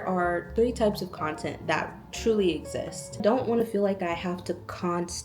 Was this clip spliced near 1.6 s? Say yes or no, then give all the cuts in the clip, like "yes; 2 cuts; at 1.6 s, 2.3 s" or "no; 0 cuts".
no; 1 cut; at 3.2 s